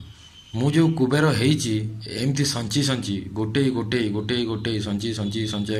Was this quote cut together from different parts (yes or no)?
no